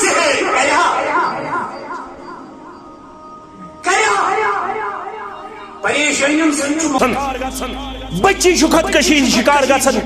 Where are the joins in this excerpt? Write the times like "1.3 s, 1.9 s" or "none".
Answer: 7.0 s